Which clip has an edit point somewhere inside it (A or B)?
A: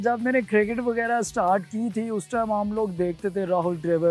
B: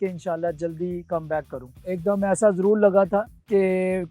B